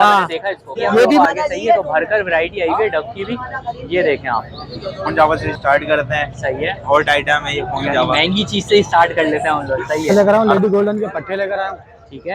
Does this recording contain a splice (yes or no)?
yes